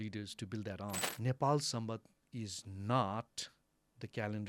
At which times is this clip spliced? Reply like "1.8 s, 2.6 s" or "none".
1.1 s